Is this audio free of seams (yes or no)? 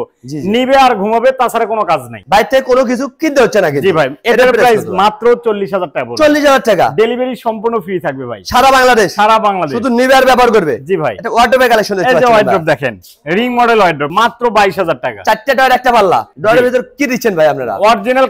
yes